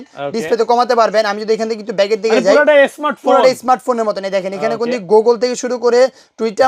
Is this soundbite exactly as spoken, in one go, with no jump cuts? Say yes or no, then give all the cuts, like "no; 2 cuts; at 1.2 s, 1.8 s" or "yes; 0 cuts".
yes; 0 cuts